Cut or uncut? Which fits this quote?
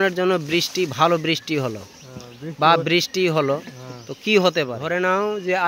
cut